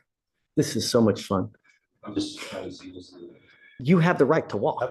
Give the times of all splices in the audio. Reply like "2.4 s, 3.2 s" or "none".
3.7 s